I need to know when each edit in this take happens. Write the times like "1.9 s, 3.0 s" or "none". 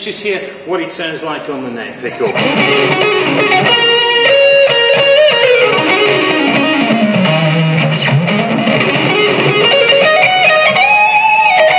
none